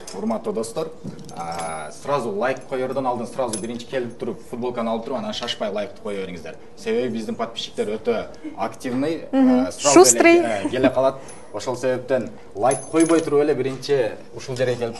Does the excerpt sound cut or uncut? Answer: uncut